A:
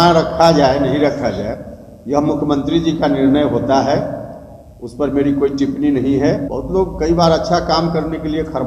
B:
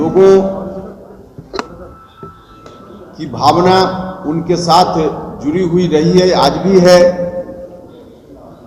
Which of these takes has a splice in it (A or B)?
A